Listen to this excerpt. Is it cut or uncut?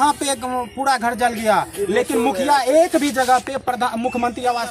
uncut